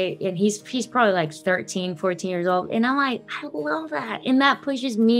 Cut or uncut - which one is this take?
uncut